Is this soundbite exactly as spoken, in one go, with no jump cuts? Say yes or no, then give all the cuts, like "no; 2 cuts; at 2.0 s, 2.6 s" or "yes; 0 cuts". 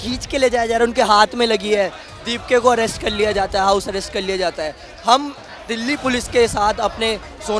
yes; 0 cuts